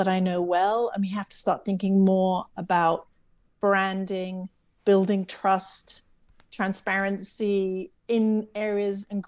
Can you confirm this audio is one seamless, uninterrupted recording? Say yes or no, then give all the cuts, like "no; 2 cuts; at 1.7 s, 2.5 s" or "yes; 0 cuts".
yes; 0 cuts